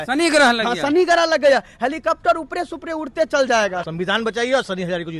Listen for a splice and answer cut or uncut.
cut